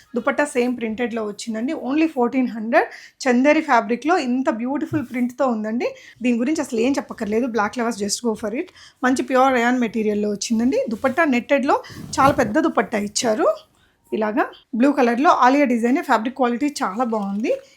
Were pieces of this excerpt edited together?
yes; 2 cuts; at 6.0 s, 14.6 s

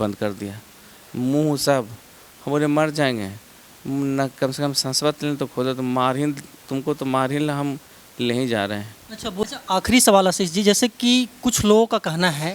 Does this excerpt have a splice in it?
yes; 1 cut; at 9.4 s

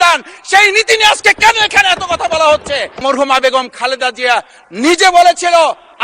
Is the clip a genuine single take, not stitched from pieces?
no; 1 cut; at 3.0 s

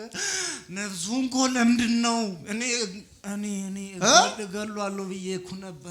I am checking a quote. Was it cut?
no; 0 cuts

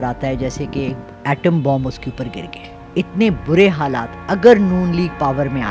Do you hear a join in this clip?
no; 0 cuts

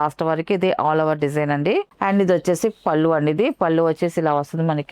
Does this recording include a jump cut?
no; 0 cuts

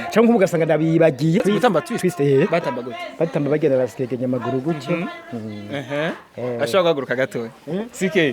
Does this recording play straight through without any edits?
no; 1 cut; at 1.4 s

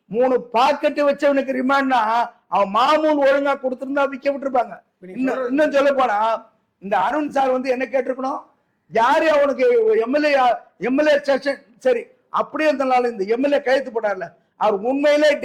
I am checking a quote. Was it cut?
no; 0 cuts

